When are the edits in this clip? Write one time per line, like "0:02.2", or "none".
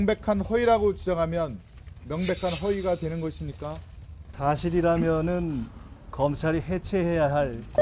0:04.2